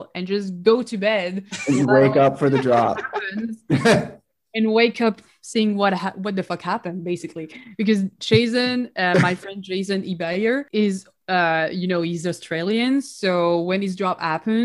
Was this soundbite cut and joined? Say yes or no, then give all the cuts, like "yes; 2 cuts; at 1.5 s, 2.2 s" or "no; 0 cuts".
yes; 1 cut; at 10.7 s